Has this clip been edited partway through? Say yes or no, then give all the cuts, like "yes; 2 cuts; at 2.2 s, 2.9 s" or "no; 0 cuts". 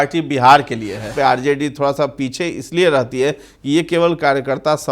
yes; 1 cut; at 1.1 s